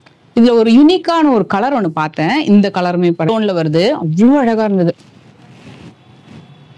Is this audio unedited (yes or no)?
no